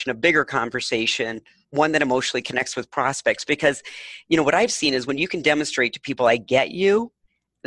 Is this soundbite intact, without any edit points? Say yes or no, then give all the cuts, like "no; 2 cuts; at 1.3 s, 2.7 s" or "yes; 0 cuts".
no; 1 cut; at 1.6 s